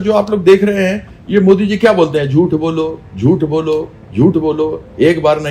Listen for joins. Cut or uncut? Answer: uncut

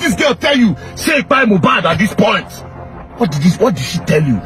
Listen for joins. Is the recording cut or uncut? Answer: uncut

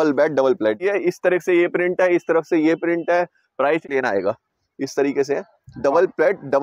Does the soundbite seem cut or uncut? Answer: cut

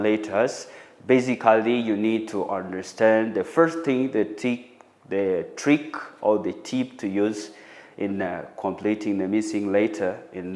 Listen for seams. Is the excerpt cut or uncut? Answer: uncut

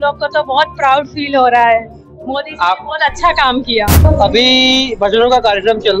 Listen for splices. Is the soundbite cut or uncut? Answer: cut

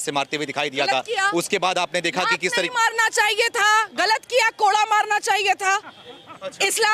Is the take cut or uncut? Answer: uncut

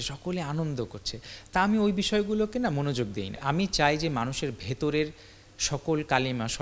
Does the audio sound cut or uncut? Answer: cut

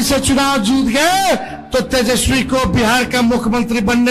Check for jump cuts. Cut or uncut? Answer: uncut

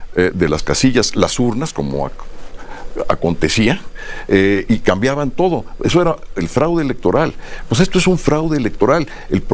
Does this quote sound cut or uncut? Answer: uncut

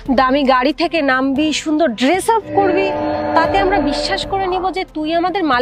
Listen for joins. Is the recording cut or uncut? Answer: uncut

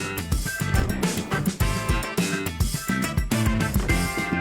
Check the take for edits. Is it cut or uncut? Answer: cut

